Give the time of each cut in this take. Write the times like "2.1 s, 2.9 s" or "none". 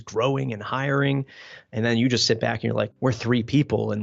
2.9 s

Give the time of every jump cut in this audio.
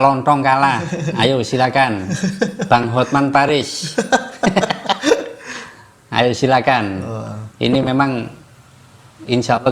none

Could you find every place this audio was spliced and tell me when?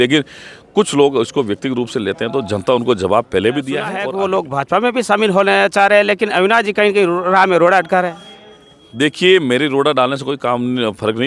4.0 s

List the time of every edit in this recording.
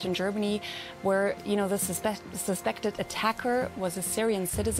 none

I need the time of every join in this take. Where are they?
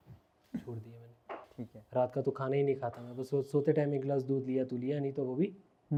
none

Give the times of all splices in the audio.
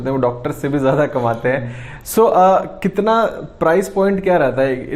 none

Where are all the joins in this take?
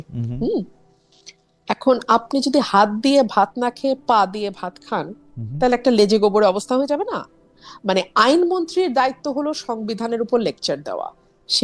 none

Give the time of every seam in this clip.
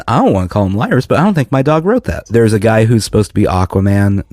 2.2 s

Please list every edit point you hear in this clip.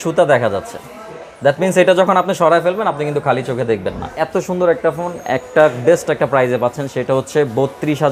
none

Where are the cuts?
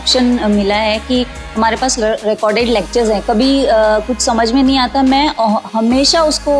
none

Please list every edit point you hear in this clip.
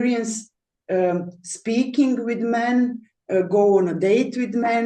none

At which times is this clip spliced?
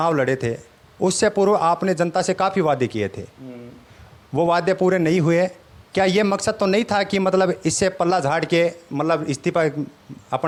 none

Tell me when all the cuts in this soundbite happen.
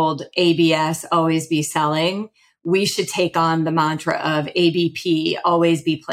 none

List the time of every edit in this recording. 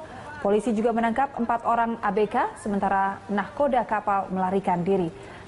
none

